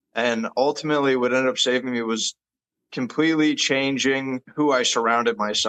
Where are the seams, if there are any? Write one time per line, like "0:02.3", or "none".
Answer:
0:04.4